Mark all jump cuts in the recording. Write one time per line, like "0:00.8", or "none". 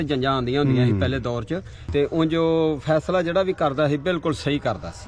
0:01.8

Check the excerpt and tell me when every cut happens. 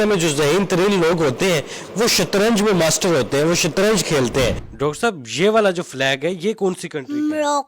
0:04.6

